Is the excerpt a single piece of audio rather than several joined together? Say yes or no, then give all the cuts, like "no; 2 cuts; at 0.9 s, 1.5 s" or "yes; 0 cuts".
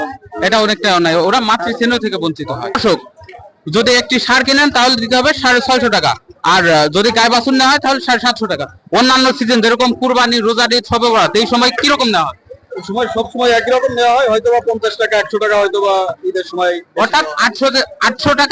no; 1 cut; at 2.8 s